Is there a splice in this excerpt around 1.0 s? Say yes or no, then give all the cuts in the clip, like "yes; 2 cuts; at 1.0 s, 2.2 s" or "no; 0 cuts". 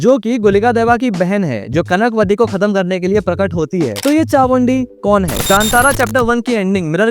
no; 2 cuts; at 3.9 s, 5.4 s